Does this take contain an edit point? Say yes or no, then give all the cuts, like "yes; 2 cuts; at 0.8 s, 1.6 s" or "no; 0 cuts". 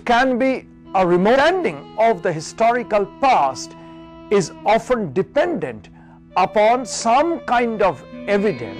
no; 0 cuts